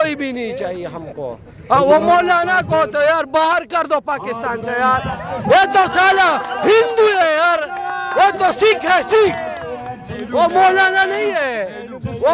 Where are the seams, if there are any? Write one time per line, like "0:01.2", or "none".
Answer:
none